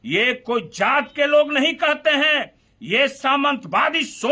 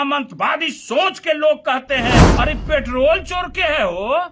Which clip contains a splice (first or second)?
second